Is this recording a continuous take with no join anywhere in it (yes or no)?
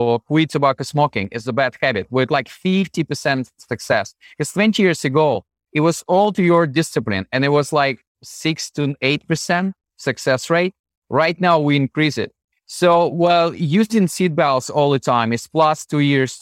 yes